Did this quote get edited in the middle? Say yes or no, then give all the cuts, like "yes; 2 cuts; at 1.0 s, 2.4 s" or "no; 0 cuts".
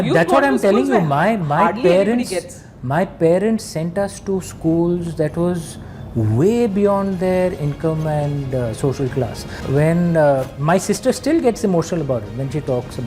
yes; 1 cut; at 9.6 s